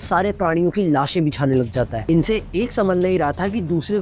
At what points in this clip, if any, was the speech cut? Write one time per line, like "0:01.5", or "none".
0:02.0